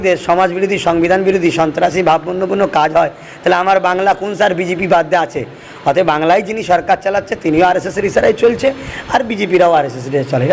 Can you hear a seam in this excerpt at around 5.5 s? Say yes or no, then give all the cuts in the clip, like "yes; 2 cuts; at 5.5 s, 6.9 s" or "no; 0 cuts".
no; 0 cuts